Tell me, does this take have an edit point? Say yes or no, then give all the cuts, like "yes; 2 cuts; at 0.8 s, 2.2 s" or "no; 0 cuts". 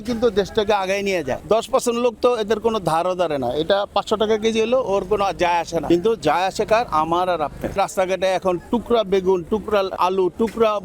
yes; 4 cuts; at 1.4 s, 5.8 s, 7.7 s, 9.9 s